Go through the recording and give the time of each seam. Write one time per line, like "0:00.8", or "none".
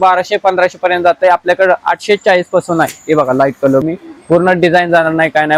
0:03.8